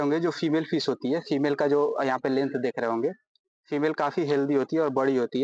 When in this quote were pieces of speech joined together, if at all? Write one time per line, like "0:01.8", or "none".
none